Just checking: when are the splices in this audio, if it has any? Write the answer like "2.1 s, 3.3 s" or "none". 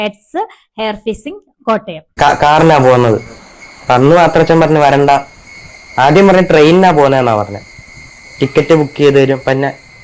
2.0 s